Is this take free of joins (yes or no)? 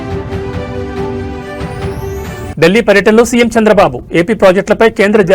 no